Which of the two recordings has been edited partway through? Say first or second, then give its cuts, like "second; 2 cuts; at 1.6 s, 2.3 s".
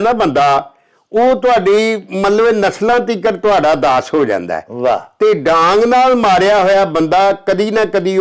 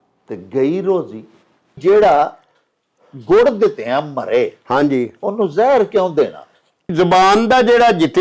second; 2 cuts; at 1.8 s, 6.9 s